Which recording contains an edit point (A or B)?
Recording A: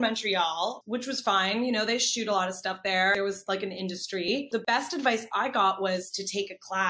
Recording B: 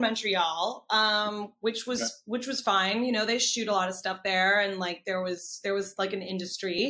A